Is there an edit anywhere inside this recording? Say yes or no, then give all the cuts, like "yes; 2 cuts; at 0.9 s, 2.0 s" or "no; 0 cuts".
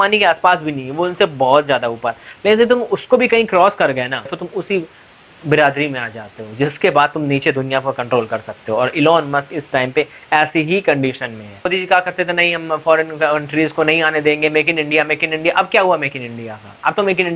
yes; 2 cuts; at 4.4 s, 11.7 s